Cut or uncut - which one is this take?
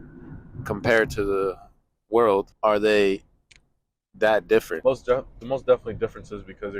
cut